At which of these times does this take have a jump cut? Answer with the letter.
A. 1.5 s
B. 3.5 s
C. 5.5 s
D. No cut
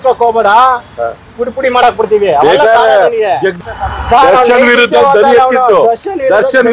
D